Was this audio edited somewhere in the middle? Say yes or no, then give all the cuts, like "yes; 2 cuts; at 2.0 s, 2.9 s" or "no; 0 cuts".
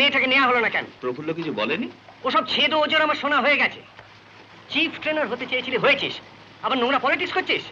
yes; 1 cut; at 0.9 s